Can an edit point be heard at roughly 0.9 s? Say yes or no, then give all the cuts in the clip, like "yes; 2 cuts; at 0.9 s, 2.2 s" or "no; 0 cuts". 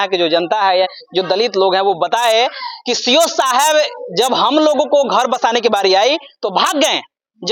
no; 0 cuts